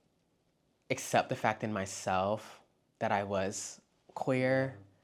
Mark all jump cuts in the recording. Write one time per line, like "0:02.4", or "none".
none